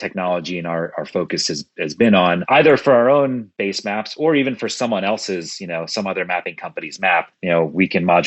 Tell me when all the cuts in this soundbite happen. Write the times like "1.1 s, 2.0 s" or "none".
2.4 s, 7.3 s